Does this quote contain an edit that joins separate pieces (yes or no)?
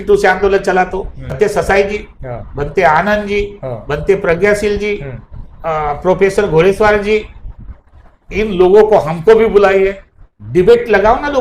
yes